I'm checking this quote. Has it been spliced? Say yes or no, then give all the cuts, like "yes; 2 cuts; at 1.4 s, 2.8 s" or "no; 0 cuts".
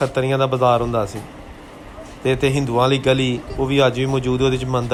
no; 0 cuts